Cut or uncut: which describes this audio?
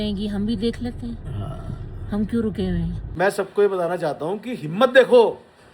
cut